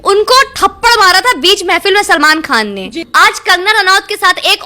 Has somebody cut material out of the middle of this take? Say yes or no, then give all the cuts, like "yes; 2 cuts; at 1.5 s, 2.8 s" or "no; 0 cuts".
yes; 1 cut; at 3.0 s